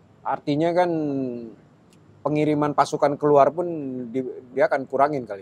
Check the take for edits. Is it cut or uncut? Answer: uncut